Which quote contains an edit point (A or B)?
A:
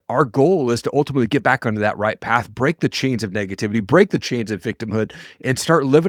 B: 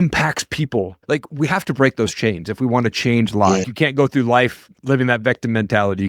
B